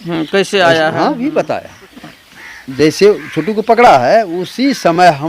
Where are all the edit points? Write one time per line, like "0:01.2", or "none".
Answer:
0:01.2